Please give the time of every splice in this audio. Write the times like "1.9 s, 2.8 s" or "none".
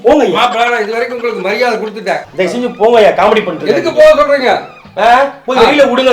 2.2 s